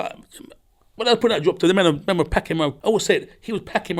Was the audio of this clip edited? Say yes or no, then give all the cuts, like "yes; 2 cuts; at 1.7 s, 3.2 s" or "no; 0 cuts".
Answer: yes; 1 cut; at 2.8 s